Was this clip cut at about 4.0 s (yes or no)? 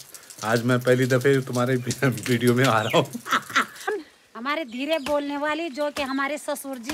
yes